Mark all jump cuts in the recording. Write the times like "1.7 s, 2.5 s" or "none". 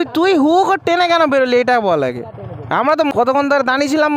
3.1 s